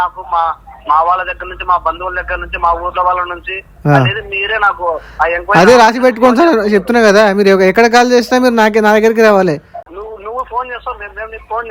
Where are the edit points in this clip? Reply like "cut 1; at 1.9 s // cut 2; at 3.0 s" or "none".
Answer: none